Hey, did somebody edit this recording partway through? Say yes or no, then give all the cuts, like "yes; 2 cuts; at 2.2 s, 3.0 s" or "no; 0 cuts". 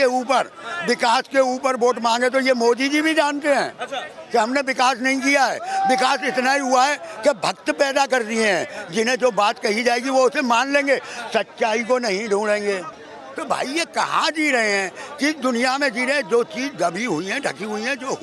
no; 0 cuts